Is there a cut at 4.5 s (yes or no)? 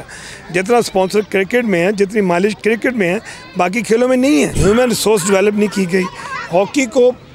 yes